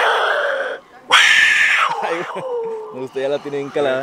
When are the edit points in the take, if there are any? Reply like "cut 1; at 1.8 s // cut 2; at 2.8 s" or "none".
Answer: none